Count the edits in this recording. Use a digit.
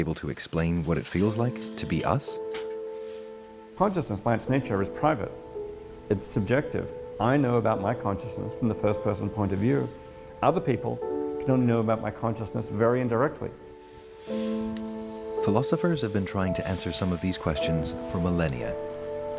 2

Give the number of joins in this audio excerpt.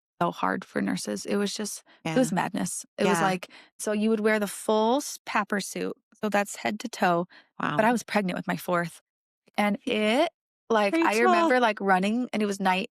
1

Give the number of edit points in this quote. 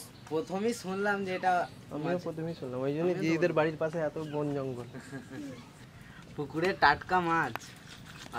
1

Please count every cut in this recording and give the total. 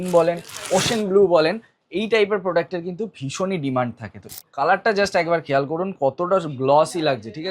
1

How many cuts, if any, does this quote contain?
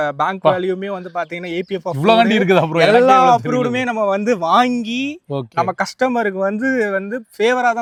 0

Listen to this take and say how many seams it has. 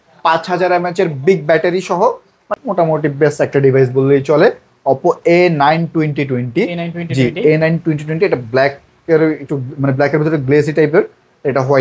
1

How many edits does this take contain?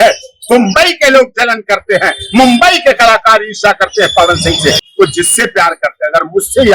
1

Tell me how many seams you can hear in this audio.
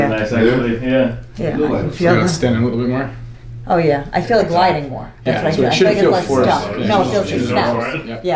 0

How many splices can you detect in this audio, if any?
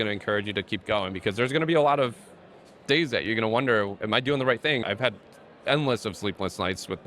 1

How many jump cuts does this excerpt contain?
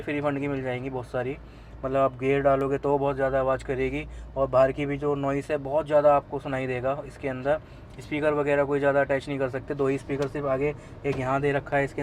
0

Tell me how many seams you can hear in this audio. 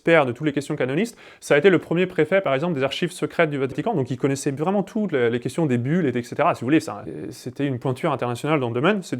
2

